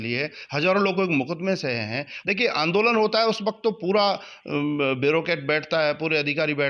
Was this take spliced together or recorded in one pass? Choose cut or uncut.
cut